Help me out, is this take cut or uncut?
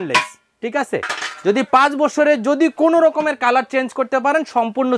uncut